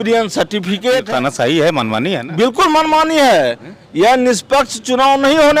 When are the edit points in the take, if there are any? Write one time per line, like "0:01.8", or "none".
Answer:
0:01.0